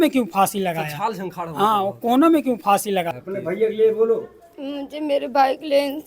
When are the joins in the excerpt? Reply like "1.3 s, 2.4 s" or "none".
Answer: 3.2 s